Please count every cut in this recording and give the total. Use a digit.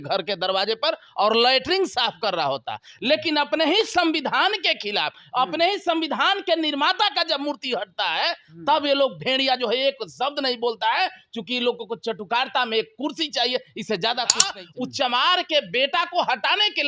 1